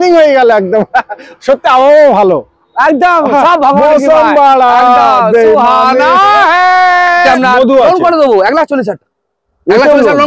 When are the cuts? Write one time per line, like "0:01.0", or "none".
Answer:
0:07.2